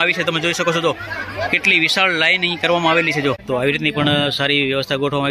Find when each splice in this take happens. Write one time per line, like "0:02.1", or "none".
0:03.4